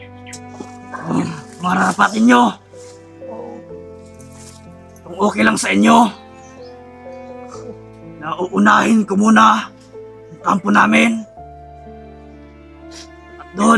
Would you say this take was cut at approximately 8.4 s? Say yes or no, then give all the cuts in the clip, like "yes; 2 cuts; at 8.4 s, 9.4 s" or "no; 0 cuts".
no; 1 cut; at 0.9 s